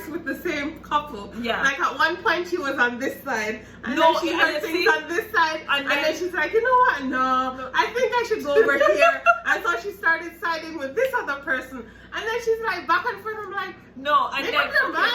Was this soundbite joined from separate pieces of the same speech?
no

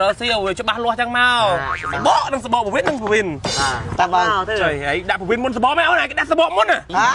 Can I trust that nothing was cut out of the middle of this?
yes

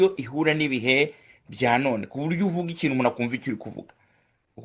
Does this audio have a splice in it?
no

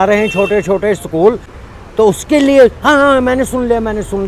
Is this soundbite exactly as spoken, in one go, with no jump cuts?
no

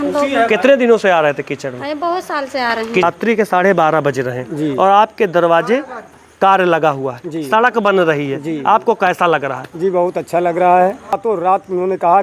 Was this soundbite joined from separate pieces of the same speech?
yes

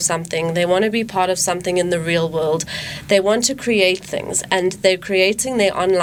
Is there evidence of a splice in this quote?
no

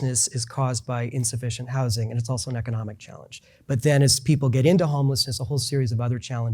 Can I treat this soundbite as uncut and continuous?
yes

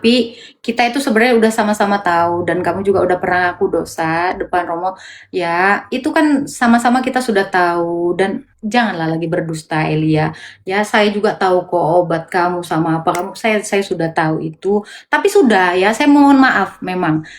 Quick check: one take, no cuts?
yes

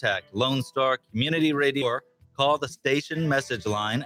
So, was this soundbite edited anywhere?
yes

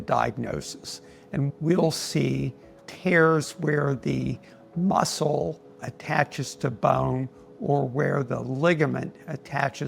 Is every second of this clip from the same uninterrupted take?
no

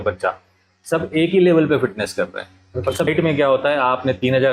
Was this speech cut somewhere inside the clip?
yes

